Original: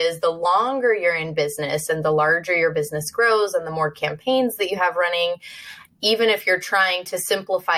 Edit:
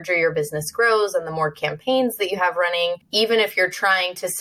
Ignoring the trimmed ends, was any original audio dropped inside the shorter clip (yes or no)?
yes